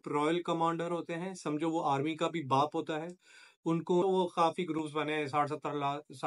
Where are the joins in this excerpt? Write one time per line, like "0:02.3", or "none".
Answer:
0:04.0